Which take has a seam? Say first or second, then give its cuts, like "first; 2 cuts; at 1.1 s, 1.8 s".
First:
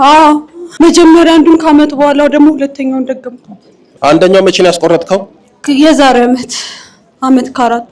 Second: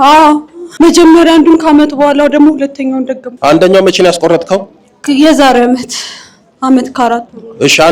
second; 1 cut; at 3.2 s